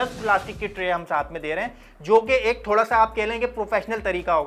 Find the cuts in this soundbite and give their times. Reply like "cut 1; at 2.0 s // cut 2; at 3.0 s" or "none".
none